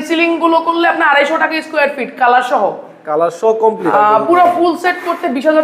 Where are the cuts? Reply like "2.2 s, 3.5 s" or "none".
3.8 s